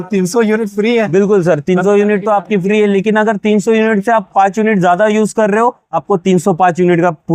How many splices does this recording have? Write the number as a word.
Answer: zero